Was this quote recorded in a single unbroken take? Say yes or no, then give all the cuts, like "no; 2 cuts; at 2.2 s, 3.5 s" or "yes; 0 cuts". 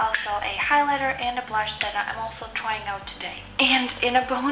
no; 1 cut; at 3.4 s